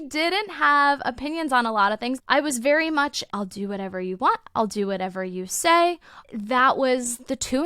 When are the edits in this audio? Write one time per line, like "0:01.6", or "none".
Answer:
0:02.2
0:06.2